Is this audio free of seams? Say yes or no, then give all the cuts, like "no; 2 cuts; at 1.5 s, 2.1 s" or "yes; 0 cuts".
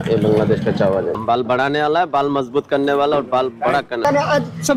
no; 2 cuts; at 1.1 s, 4.0 s